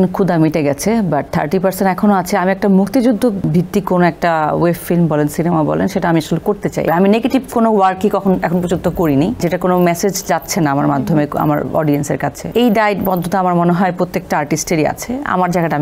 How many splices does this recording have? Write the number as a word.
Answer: four